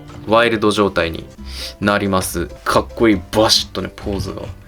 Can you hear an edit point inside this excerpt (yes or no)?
yes